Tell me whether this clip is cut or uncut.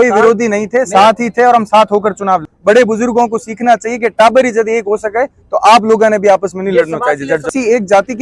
cut